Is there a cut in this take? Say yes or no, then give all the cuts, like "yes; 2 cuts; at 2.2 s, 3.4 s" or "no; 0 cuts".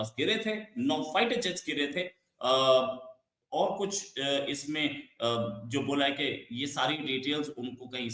no; 0 cuts